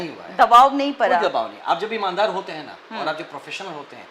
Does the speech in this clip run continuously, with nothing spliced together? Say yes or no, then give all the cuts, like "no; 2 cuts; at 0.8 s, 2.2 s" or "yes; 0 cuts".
yes; 0 cuts